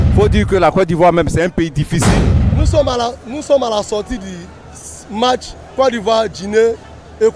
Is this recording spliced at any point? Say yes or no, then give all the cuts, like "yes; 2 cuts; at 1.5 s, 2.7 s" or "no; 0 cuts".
no; 0 cuts